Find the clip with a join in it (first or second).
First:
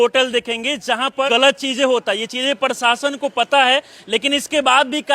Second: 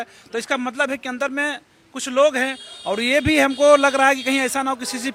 first